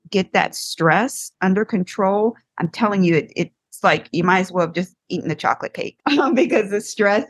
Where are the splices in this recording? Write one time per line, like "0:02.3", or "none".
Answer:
0:03.6
0:05.9

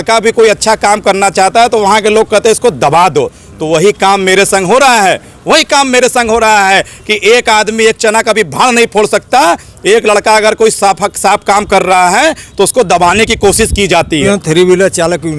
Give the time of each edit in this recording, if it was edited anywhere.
0:14.2

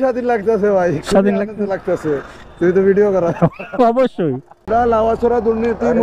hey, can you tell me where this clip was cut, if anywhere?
0:04.5

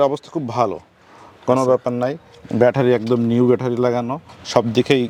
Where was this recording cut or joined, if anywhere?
none

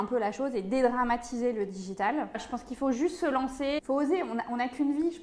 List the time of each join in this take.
0:02.3
0:03.8

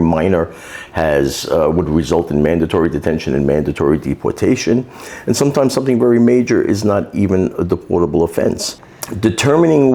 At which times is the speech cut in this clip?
none

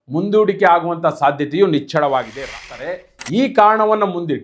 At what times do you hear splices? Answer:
0:02.7

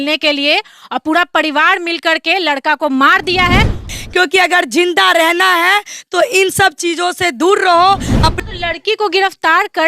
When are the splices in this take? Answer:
0:04.0
0:08.4

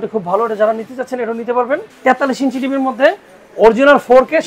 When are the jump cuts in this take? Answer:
0:01.9

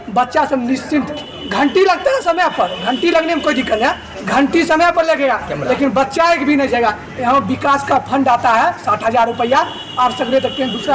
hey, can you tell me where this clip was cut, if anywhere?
none

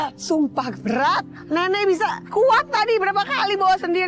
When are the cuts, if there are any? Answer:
0:01.3
0:02.2

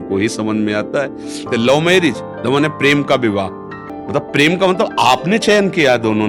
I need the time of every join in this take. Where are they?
0:01.5
0:04.0

